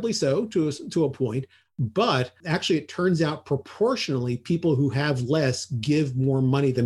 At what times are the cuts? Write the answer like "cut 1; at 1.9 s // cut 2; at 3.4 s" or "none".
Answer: cut 1; at 2.4 s